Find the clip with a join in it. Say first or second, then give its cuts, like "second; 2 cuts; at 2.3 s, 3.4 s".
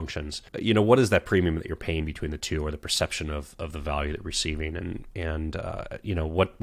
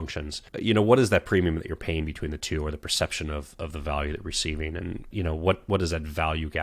second; 1 cut; at 5.1 s